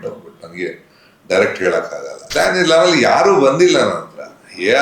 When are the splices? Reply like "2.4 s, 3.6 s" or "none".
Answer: 2.2 s